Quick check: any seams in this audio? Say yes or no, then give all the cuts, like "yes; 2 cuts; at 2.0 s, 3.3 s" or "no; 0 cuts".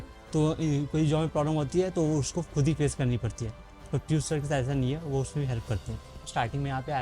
yes; 1 cut; at 6.1 s